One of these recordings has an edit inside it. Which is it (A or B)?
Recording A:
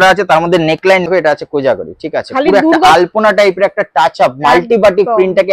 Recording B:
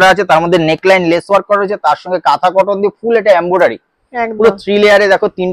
A